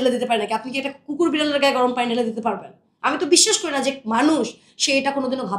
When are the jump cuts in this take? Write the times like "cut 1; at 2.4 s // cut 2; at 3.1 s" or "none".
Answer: none